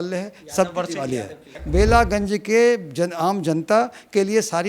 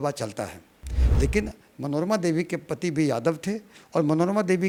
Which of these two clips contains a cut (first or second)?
first